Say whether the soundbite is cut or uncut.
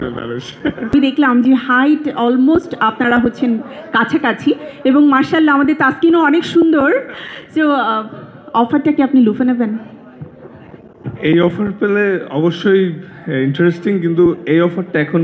cut